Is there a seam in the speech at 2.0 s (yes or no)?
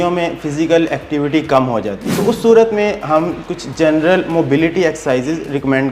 yes